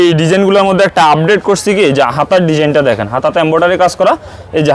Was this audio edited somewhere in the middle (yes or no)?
no